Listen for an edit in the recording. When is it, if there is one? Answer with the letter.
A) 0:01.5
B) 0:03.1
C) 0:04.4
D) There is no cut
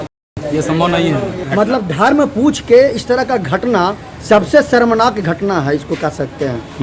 A